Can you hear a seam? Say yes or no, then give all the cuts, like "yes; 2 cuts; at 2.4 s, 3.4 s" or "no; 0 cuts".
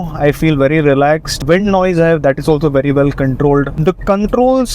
yes; 1 cut; at 1.4 s